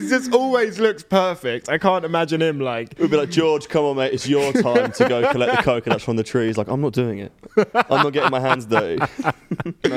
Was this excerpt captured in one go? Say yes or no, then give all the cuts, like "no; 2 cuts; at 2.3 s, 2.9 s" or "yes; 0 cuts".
yes; 0 cuts